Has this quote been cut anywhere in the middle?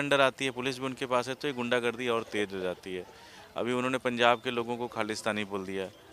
no; 0 cuts

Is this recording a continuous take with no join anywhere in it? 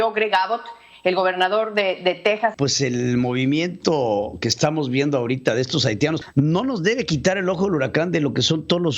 no; 2 cuts; at 2.5 s, 6.2 s

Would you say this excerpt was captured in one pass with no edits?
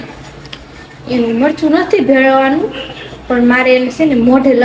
yes; 0 cuts

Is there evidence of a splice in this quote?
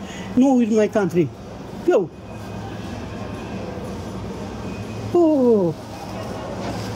no; 0 cuts

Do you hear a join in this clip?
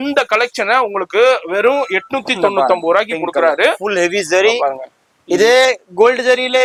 no; 0 cuts

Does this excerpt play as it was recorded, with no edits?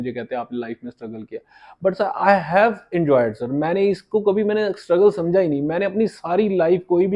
yes; 0 cuts

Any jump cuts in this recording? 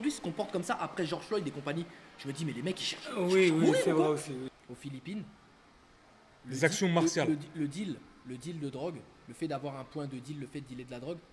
yes; 1 cut; at 4.5 s

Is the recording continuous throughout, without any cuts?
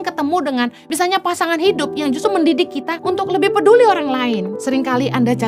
no; 2 cuts; at 2.9 s, 4.5 s

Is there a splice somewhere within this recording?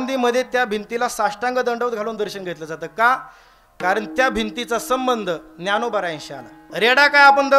yes; 1 cut; at 6.6 s

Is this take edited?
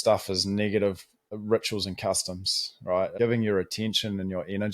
yes; 2 cuts; at 1.3 s, 3.1 s

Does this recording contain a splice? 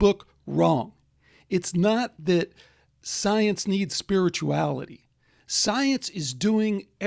no; 0 cuts

